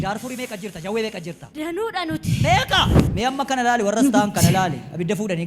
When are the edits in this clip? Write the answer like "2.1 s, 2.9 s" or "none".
1.4 s, 3.0 s